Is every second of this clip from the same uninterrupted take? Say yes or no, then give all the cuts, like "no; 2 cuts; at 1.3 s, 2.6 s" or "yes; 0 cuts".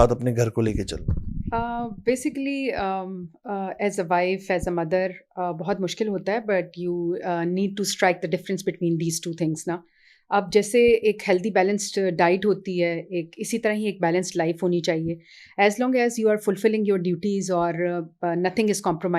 yes; 0 cuts